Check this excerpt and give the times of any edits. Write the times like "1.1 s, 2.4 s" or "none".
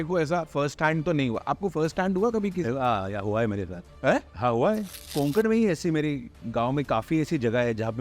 5.0 s